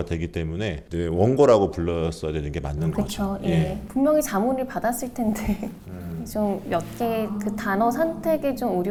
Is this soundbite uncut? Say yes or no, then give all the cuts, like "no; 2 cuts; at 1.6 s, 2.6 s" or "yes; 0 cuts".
yes; 0 cuts